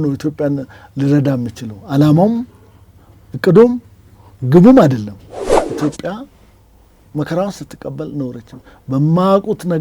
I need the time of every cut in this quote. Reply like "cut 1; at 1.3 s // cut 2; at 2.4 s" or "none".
cut 1; at 5.6 s